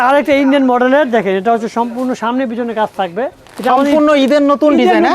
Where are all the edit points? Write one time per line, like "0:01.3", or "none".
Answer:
0:03.4